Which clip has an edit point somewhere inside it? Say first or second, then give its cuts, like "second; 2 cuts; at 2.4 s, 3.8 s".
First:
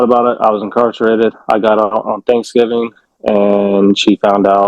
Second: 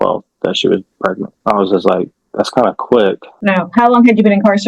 second; 2 cuts; at 1.3 s, 3.3 s